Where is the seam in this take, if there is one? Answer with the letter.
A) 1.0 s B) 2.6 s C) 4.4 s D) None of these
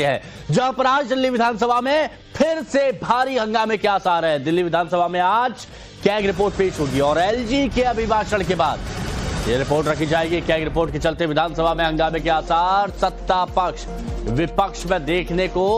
B